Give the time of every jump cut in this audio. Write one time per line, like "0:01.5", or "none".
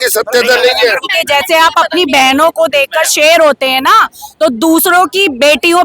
0:01.0